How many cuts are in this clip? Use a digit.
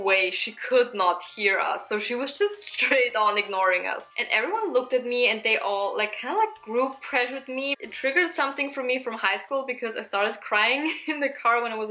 2